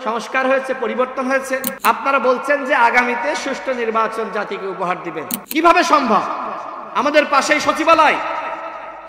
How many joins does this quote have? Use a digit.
2